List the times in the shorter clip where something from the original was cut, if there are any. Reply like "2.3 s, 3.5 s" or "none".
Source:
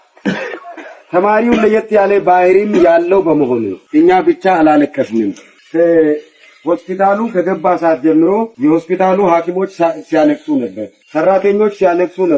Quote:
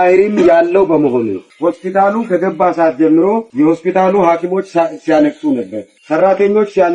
1.4 s